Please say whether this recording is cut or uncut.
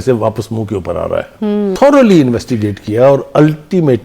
cut